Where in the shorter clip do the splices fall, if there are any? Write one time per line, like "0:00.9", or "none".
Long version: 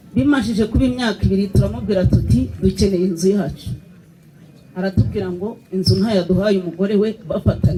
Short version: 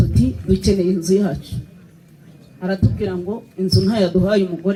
none